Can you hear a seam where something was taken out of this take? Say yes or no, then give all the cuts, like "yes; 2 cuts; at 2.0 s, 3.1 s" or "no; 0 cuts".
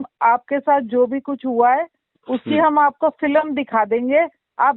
no; 0 cuts